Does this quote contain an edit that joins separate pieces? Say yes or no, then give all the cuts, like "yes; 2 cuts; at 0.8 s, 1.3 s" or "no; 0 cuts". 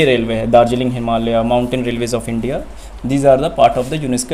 no; 0 cuts